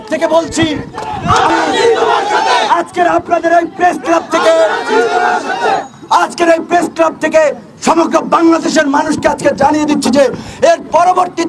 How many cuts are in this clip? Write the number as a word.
one